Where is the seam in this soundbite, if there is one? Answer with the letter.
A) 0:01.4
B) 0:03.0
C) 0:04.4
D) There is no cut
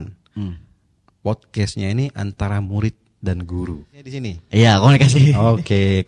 C